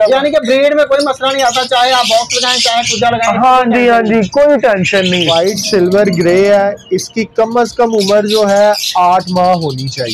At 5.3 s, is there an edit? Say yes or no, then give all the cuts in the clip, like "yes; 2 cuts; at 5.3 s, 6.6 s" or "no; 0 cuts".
yes; 1 cut; at 5.3 s